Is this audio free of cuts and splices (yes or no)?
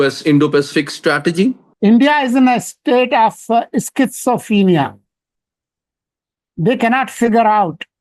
no